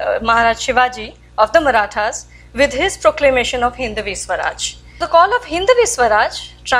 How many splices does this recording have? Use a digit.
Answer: 1